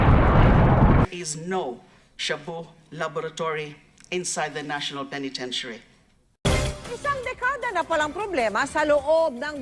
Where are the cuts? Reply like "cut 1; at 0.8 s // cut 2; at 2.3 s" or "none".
cut 1; at 1.0 s